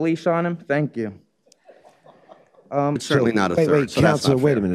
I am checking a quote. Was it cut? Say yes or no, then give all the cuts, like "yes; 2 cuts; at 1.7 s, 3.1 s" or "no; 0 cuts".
yes; 1 cut; at 3.0 s